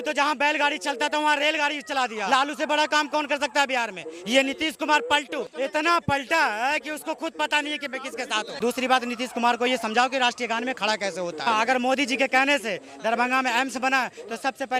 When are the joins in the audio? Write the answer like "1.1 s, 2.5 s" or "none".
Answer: 2.3 s, 5.5 s, 8.6 s, 11.5 s